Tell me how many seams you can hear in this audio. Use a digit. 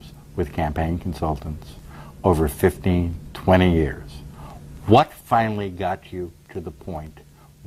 0